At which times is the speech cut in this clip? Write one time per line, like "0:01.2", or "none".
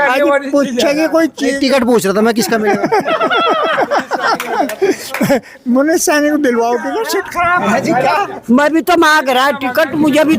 0:07.0